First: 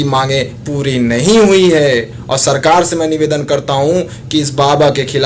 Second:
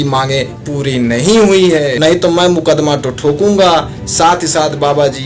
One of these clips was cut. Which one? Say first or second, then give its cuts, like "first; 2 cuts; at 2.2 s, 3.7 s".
second; 1 cut; at 1.9 s